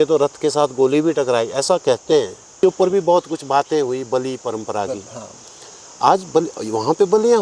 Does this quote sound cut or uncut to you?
cut